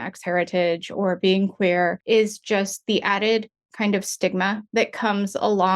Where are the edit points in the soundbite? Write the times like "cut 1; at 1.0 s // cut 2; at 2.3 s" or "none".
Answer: cut 1; at 2.0 s // cut 2; at 4.6 s